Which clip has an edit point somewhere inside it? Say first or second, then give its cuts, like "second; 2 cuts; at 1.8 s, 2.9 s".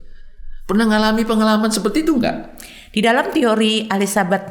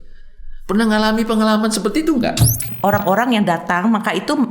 second; 1 cut; at 2.6 s